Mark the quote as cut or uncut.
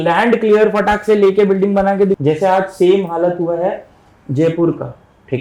cut